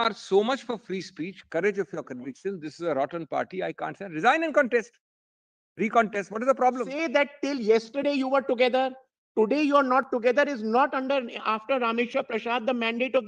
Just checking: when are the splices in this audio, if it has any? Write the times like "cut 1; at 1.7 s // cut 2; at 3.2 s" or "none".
cut 1; at 6.9 s